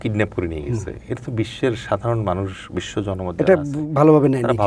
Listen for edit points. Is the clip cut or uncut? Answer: uncut